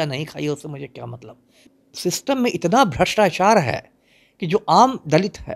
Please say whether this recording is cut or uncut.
cut